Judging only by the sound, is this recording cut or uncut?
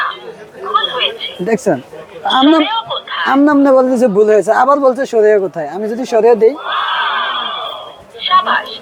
uncut